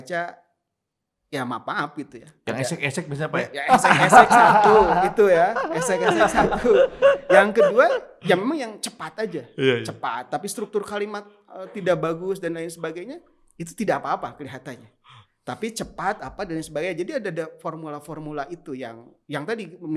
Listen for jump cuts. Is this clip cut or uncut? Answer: uncut